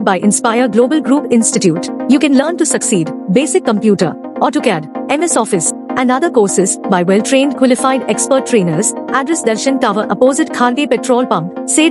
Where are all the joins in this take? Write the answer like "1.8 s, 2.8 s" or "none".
none